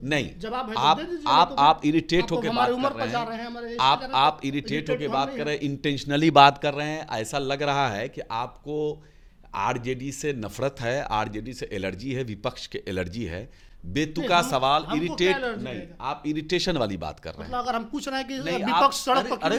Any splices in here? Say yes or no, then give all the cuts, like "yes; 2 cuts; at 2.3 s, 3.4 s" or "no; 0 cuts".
no; 0 cuts